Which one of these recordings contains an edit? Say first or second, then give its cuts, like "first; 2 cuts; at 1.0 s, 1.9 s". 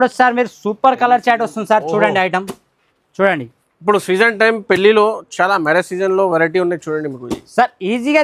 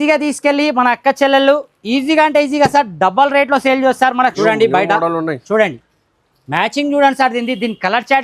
second; 1 cut; at 4.4 s